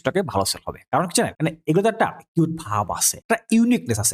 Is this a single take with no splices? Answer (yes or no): no